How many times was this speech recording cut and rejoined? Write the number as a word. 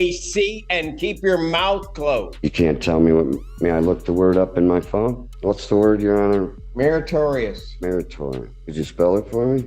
four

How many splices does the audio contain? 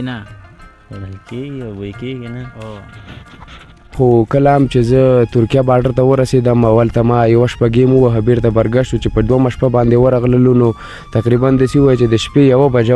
one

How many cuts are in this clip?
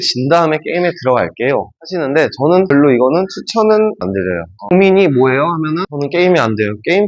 four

